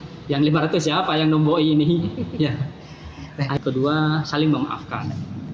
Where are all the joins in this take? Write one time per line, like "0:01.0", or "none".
0:03.6